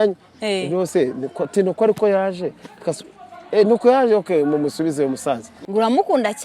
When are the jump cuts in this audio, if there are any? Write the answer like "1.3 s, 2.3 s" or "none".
5.5 s